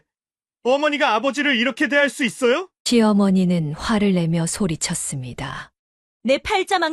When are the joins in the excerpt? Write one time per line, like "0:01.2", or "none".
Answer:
none